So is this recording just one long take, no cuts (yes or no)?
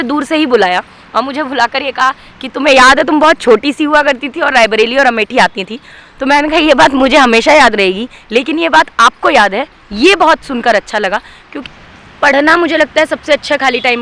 no